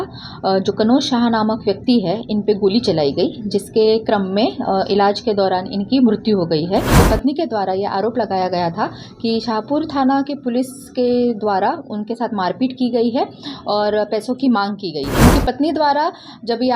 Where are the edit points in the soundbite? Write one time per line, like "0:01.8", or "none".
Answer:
0:07.0
0:15.1